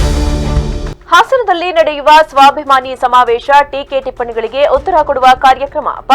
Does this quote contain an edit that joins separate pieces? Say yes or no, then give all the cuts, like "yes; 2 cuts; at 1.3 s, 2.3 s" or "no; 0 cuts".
yes; 1 cut; at 0.9 s